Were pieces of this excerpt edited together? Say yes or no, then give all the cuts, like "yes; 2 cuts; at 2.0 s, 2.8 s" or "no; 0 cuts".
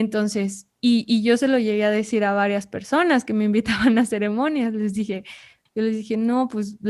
yes; 1 cut; at 5.6 s